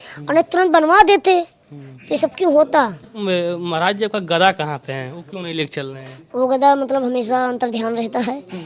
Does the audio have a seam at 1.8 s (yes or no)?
no